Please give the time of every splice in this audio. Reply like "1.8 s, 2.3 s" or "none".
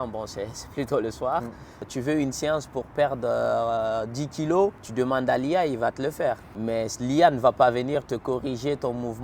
1.8 s, 4.8 s, 6.5 s

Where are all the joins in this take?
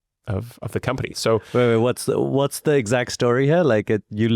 1.5 s

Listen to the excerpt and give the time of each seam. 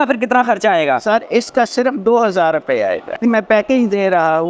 3.2 s

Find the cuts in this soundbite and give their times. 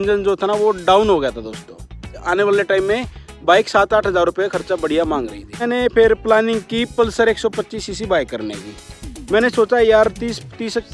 2.1 s, 5.6 s

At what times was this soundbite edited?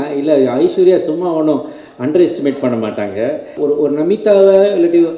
3.5 s

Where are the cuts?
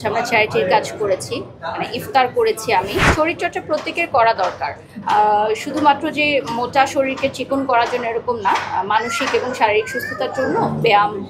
3.1 s

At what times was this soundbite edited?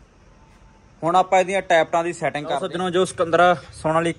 2.6 s

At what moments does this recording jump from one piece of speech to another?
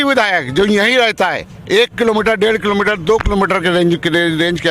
none

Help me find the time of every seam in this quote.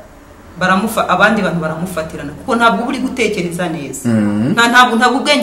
none

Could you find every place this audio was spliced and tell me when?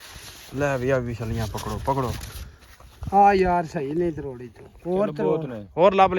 none

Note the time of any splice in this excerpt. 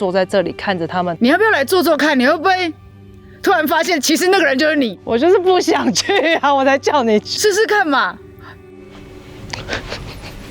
8.9 s

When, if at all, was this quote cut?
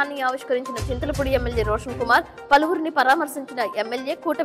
none

